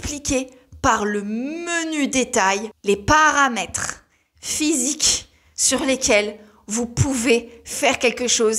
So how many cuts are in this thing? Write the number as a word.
one